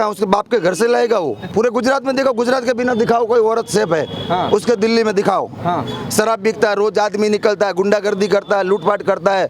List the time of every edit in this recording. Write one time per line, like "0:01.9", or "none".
0:01.4